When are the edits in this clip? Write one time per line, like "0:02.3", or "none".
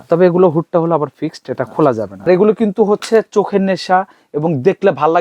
0:02.3